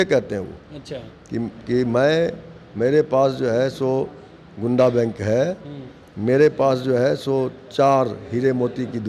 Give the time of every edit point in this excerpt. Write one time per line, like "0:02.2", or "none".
none